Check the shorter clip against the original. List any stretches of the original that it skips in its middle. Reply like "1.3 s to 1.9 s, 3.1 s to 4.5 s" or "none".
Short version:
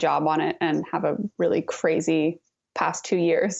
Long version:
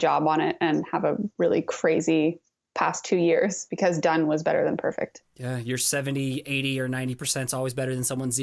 none